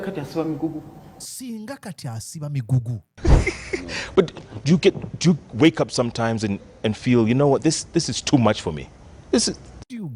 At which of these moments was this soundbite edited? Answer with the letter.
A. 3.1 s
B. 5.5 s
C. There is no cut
A